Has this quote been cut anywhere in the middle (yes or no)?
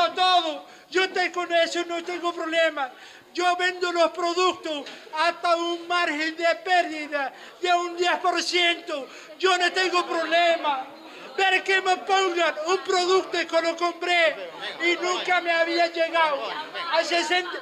no